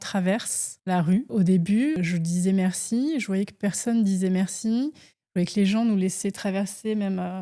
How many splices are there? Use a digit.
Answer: 2